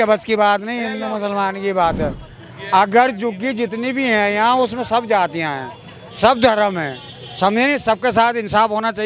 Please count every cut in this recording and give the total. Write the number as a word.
zero